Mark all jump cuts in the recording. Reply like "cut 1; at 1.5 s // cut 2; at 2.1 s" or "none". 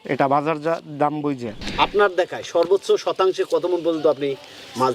cut 1; at 1.6 s